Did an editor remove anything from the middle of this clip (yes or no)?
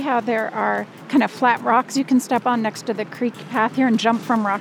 yes